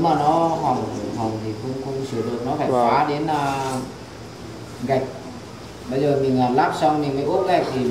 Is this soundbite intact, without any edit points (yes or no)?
yes